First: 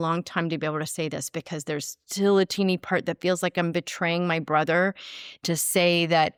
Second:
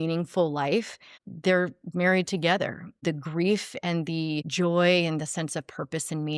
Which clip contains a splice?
second; 3 cuts; at 1.0 s, 3.0 s, 4.5 s

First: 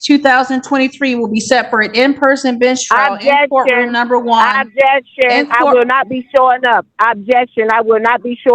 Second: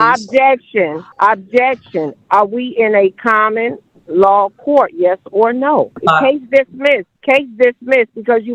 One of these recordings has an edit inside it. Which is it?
second; 3 cuts; at 1.0 s, 6.0 s, 7.1 s

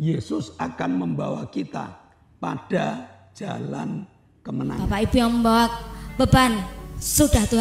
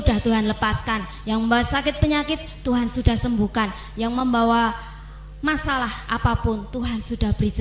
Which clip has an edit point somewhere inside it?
first; 1 cut; at 4.8 s

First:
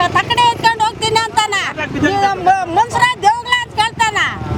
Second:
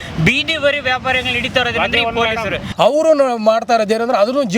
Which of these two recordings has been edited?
second; 1 cut; at 2.7 s

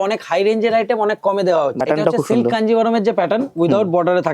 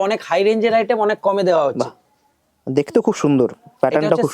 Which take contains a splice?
first; 1 cut; at 1.8 s

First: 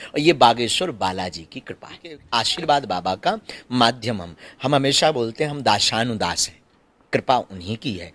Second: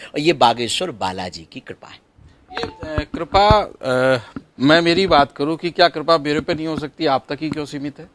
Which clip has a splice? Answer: first; 1 cut; at 2.1 s

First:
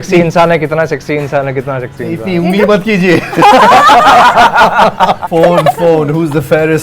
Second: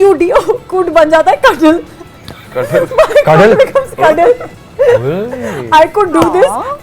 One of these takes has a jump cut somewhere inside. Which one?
first; 1 cut; at 5.2 s

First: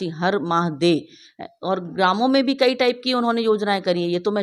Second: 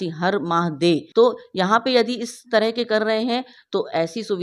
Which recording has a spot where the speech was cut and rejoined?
second; 1 cut; at 1.1 s

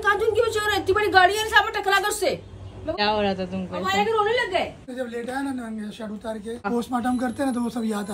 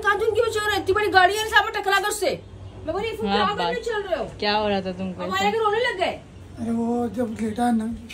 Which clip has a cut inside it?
first; 3 cuts; at 2.9 s, 4.8 s, 6.7 s

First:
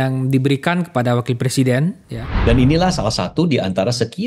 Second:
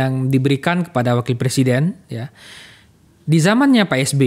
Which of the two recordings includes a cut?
first; 1 cut; at 2.3 s

